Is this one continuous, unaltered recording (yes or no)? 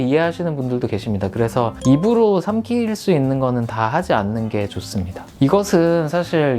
yes